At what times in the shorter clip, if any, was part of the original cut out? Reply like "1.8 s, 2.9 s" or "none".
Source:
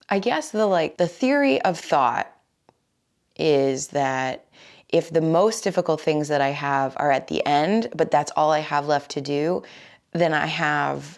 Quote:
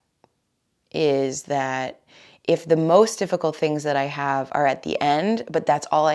none